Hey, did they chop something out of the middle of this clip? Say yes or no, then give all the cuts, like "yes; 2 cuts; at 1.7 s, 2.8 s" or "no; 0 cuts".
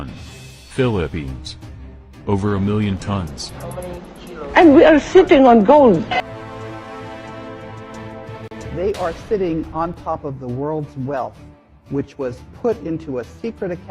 yes; 1 cut; at 8.7 s